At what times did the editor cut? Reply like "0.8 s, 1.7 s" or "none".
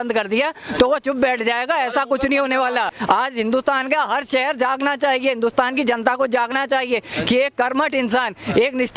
2.9 s